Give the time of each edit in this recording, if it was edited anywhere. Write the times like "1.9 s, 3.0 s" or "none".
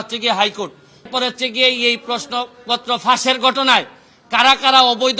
1.1 s